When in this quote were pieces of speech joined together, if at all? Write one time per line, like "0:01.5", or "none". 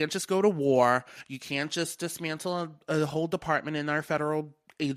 none